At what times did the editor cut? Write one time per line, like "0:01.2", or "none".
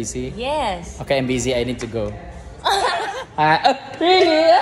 0:03.1